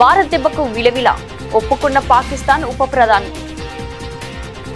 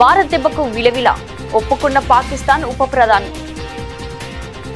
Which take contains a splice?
second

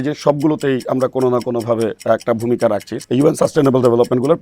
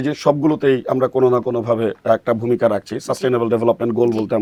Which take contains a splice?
first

